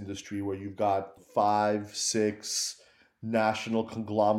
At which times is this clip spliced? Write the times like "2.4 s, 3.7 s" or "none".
1.2 s